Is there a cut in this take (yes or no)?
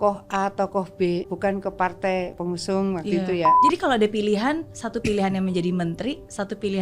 yes